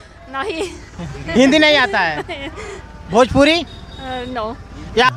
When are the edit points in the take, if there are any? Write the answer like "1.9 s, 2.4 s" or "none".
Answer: none